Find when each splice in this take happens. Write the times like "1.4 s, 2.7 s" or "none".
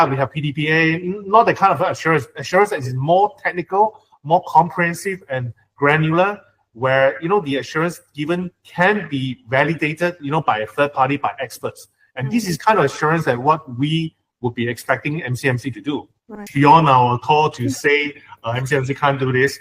16.4 s